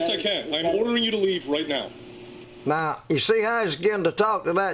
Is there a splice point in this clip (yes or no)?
no